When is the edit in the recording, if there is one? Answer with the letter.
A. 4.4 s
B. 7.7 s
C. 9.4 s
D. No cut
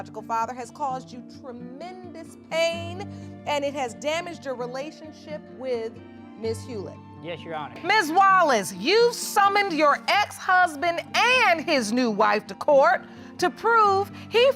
B